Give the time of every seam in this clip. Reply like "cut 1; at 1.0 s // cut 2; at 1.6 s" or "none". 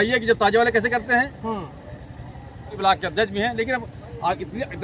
cut 1; at 2.8 s